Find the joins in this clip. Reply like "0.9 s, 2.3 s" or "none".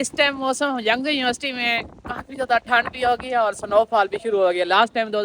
none